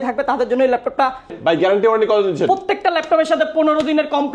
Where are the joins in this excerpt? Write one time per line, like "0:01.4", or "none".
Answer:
0:01.3

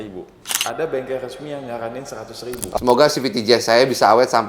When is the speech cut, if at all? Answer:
0:02.8

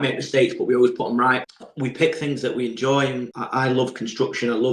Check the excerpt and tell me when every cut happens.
0:01.5
0:03.3

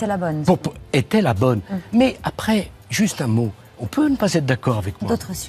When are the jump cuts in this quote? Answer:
none

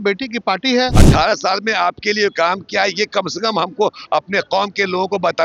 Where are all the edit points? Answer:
0:01.0

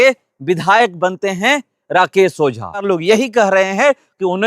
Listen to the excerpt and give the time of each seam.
0:02.8

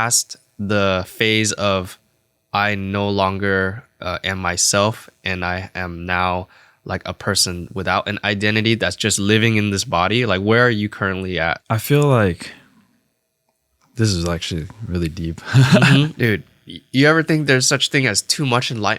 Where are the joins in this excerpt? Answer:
0:11.6
0:16.1

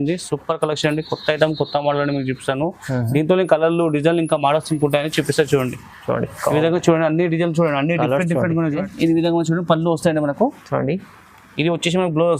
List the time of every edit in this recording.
0:08.8

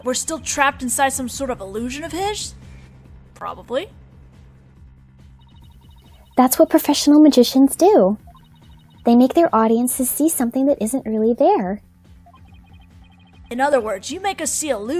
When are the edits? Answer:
0:07.7

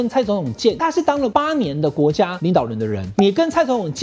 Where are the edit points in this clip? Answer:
0:00.9
0:02.6

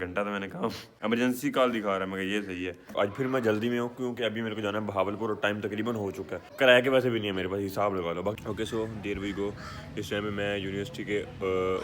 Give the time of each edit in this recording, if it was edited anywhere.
0:00.9
0:02.9
0:06.4
0:08.4

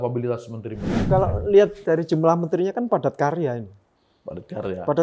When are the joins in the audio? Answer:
0:01.1

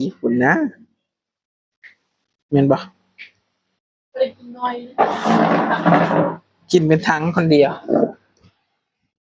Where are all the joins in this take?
none

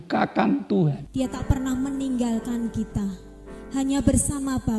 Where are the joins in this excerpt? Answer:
0:01.0

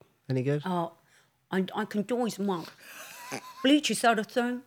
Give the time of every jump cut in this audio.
none

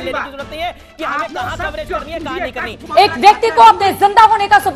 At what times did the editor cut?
0:02.8

